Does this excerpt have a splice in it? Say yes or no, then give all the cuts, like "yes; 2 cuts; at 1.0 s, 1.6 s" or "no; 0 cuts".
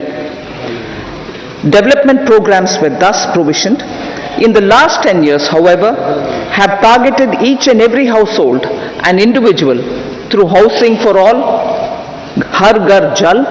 no; 0 cuts